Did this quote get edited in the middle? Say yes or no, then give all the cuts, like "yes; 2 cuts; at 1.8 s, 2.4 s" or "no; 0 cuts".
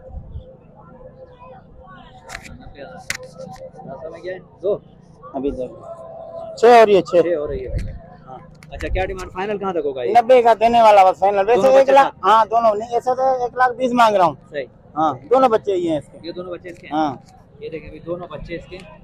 no; 0 cuts